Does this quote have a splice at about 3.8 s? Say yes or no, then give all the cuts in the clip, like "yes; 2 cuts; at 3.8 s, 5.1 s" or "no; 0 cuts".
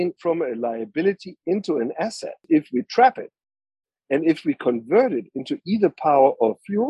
no; 1 cut; at 2.4 s